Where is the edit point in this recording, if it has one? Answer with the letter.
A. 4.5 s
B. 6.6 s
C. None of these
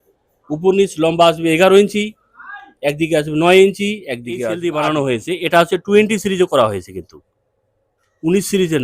A